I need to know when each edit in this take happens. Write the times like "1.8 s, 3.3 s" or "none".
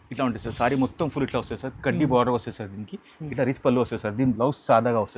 none